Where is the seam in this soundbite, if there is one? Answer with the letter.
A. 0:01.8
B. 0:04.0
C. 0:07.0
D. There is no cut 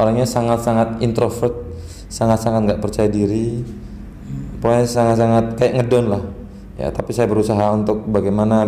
D